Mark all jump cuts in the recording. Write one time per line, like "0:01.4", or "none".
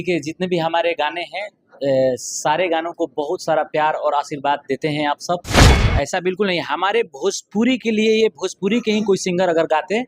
0:05.8

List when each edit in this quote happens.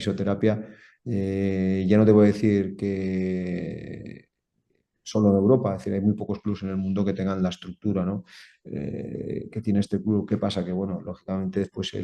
none

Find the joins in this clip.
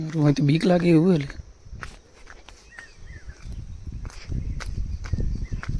none

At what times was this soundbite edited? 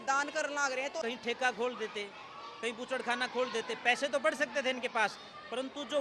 0:01.0

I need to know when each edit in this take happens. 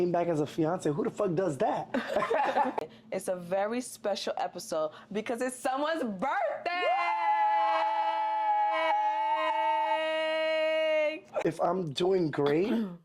0:02.8
0:11.3

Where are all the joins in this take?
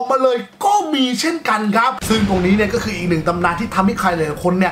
0:02.0

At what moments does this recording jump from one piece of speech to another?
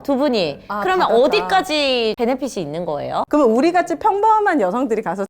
0:02.2
0:03.3

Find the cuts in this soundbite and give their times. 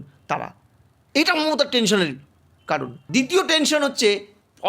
0:03.0

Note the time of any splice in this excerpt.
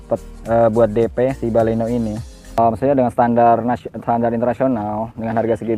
0:02.6

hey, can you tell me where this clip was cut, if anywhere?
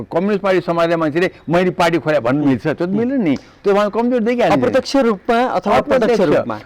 none

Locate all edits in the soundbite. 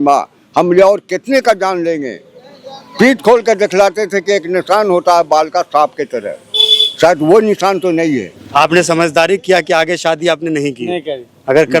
0:08.4

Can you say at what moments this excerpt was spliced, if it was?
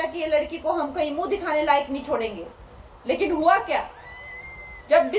none

